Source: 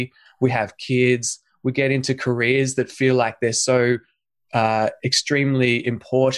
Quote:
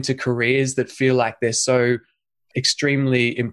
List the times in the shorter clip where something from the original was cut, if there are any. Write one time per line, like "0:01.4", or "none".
0:02.5